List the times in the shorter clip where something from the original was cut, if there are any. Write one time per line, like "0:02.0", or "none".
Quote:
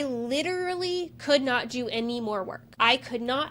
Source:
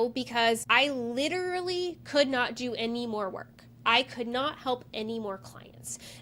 0:02.6